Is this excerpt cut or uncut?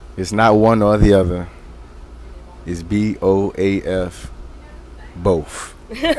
uncut